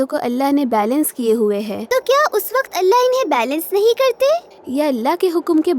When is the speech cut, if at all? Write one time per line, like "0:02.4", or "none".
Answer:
0:01.8